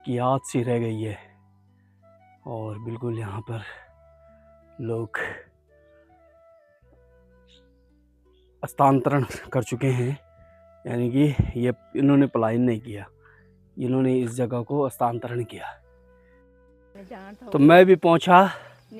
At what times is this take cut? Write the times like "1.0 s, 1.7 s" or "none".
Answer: 5.5 s, 8.5 s, 16.5 s